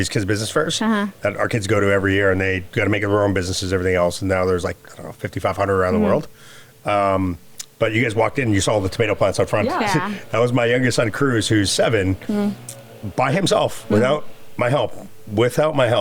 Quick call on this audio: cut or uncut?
uncut